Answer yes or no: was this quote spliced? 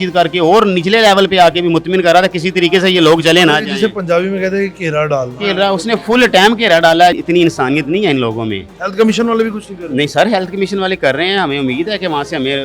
yes